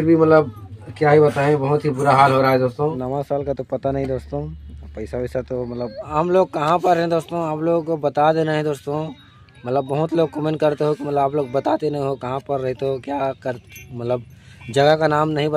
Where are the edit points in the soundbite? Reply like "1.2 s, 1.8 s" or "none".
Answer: 3.0 s, 6.1 s

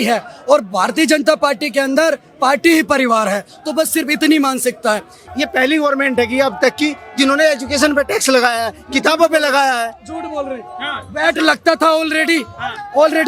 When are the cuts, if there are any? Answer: 5.2 s

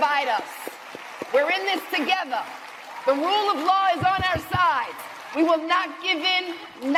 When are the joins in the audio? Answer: none

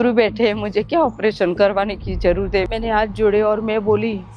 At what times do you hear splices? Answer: 2.7 s

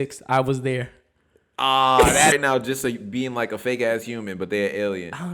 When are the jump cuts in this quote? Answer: 2.4 s

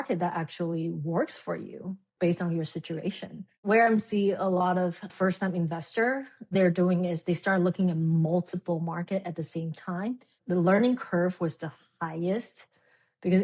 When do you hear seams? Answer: 5.1 s, 6.5 s, 10.3 s

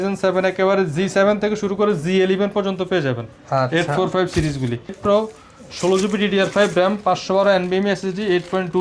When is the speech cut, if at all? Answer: 5.0 s

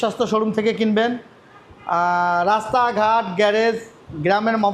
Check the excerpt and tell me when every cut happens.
none

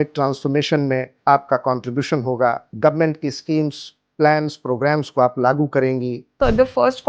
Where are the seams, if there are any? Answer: 1.1 s, 2.7 s, 6.4 s

